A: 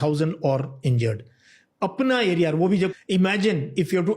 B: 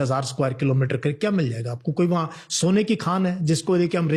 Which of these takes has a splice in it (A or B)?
A